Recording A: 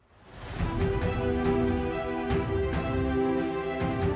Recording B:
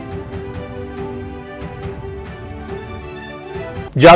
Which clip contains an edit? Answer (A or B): B